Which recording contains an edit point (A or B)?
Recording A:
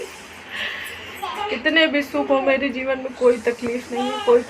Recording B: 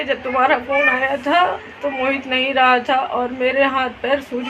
A